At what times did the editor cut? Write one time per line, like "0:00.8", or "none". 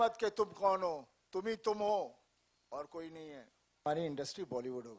0:03.8